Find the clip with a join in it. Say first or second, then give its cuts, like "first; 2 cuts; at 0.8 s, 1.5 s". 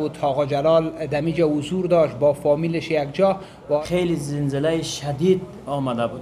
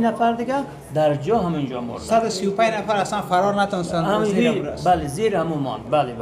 first; 1 cut; at 3.8 s